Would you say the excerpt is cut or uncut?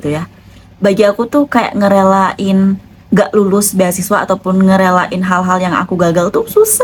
uncut